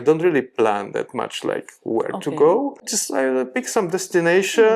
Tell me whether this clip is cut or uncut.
cut